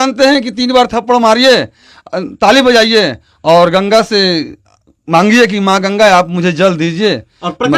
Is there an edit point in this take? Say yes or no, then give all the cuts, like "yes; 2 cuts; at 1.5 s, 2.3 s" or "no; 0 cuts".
no; 0 cuts